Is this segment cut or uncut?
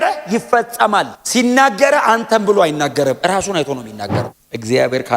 cut